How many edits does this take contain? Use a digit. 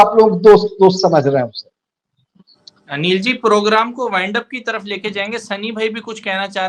0